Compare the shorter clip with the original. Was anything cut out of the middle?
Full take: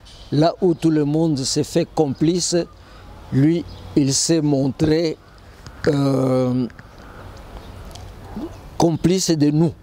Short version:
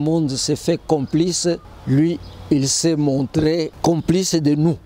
yes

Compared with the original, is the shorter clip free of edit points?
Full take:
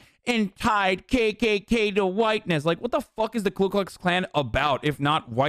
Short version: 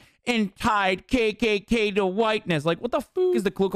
yes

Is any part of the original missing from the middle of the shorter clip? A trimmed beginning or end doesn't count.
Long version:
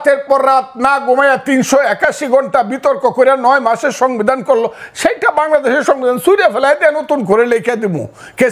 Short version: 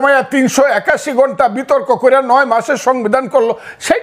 no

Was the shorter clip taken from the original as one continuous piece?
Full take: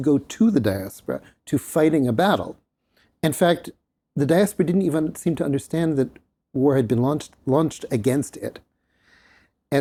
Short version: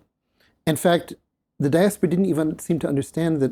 yes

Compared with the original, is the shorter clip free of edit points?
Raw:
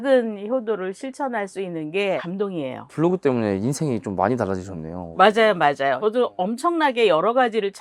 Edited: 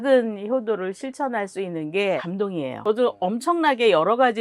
no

